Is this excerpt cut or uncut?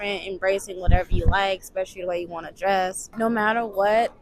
cut